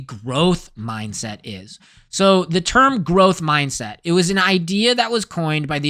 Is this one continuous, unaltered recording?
yes; 0 cuts

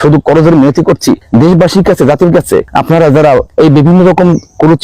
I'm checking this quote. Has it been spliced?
yes; 3 cuts; at 1.2 s, 2.7 s, 3.5 s

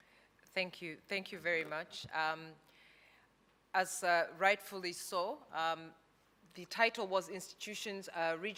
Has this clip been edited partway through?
no; 0 cuts

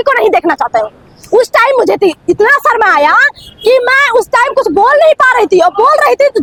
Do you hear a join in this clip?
no; 0 cuts

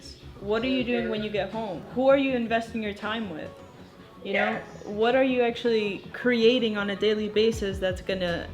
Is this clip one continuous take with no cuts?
no; 1 cut; at 1.8 s

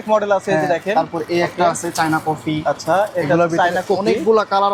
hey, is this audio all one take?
yes; 0 cuts

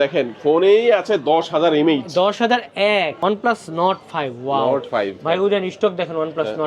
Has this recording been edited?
yes; 1 cut; at 3.1 s

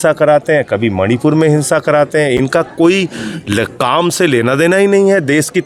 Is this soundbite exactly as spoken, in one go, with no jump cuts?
yes; 0 cuts

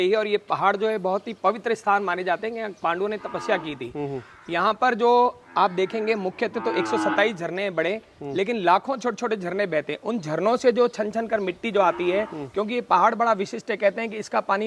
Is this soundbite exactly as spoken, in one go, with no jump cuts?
yes; 0 cuts

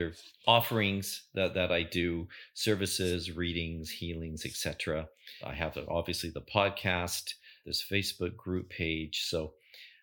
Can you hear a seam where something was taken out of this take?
no; 0 cuts

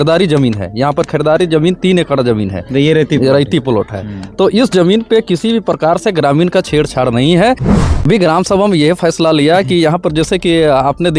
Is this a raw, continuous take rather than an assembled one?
no; 1 cut; at 7.7 s

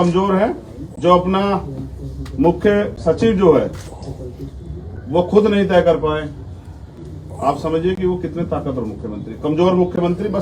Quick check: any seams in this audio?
no; 0 cuts

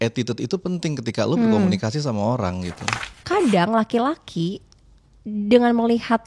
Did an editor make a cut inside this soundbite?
yes; 1 cut; at 3.0 s

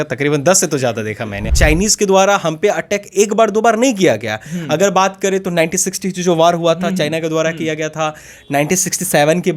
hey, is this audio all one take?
no; 1 cut; at 1.3 s

